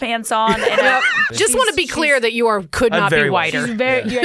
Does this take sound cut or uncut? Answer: cut